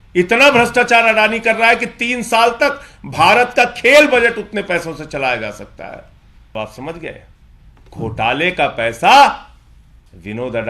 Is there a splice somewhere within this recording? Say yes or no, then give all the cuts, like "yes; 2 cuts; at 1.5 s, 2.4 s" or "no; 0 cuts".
yes; 1 cut; at 6.5 s